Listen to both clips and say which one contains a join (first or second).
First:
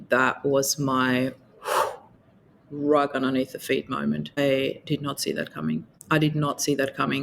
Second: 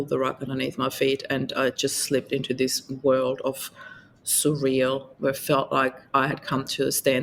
first